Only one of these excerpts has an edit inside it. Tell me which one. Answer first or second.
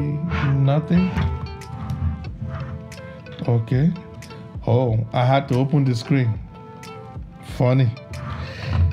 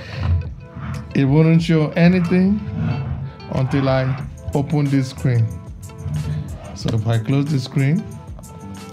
first